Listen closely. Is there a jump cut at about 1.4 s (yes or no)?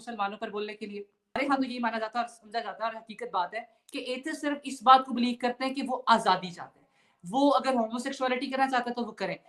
yes